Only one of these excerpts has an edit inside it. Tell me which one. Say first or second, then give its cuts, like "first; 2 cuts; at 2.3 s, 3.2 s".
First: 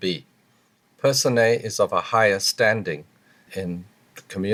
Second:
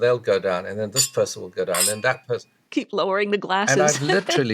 second; 1 cut; at 2.5 s